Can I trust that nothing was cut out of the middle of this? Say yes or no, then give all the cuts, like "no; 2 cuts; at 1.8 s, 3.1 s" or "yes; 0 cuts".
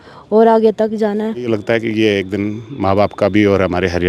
no; 1 cut; at 1.5 s